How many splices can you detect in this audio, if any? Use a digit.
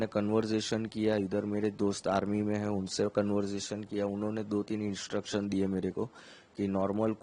0